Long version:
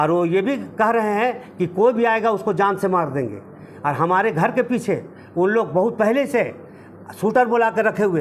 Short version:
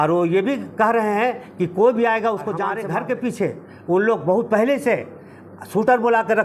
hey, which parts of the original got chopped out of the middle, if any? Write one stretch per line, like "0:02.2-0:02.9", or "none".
0:02.6-0:04.1